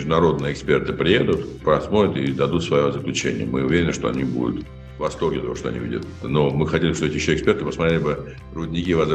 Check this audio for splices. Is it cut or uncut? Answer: cut